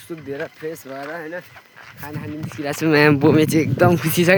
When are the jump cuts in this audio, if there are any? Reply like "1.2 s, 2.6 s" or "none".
none